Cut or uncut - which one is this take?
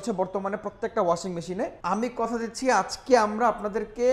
cut